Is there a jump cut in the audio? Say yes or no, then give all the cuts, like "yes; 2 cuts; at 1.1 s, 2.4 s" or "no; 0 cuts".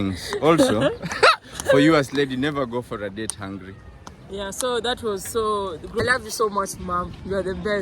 yes; 1 cut; at 6.0 s